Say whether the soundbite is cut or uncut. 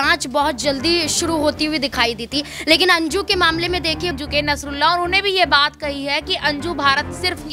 cut